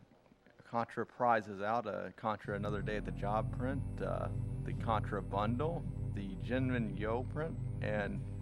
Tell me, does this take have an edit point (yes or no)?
yes